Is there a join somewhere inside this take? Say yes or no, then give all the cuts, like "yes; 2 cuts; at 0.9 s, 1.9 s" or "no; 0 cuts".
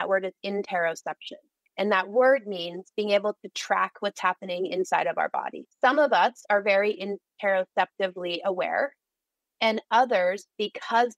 no; 0 cuts